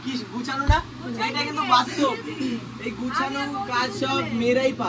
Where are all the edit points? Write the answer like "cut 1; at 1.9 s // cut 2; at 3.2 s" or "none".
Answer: none